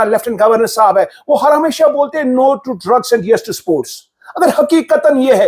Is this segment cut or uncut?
uncut